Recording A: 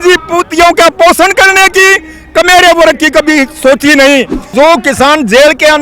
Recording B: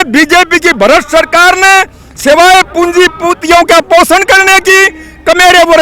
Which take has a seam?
A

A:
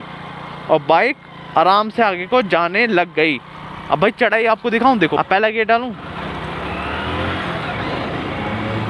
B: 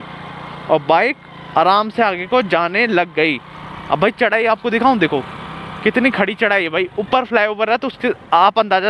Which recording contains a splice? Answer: A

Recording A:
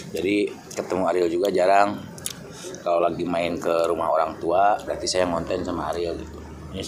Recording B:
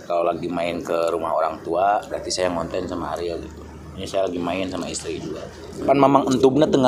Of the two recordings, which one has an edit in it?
B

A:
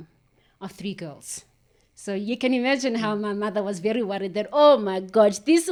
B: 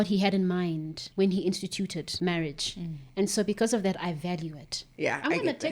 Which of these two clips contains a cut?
B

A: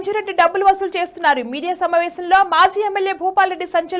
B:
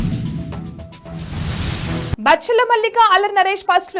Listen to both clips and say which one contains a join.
B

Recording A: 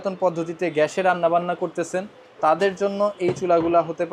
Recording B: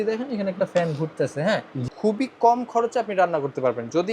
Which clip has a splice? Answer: B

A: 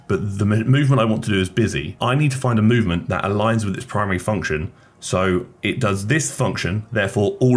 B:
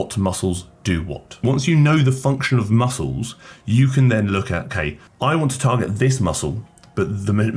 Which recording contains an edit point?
B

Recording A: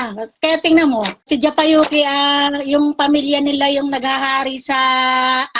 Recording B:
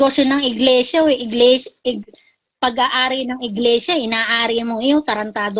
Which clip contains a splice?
A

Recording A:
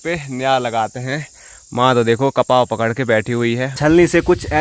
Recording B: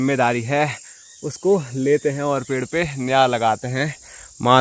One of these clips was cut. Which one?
A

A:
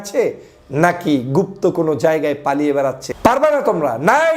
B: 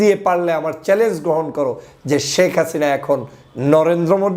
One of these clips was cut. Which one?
A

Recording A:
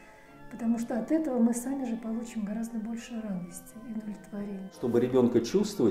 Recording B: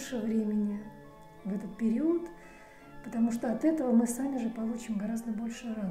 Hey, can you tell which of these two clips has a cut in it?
A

